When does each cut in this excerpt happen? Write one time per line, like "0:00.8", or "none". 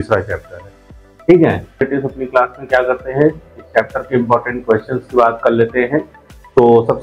0:01.9